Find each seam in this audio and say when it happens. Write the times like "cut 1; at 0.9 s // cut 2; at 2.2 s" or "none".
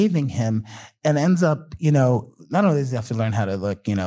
cut 1; at 2.3 s